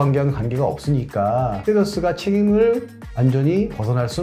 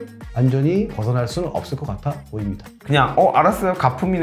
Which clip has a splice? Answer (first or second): second